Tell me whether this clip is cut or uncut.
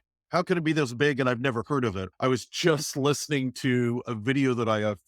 cut